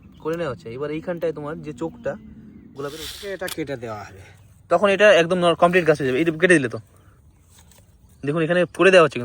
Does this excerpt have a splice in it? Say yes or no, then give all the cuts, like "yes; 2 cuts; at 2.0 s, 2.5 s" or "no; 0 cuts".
yes; 1 cut; at 3.1 s